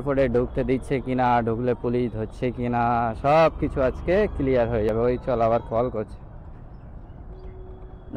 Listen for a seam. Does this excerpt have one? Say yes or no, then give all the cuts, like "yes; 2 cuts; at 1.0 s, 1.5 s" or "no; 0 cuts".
no; 0 cuts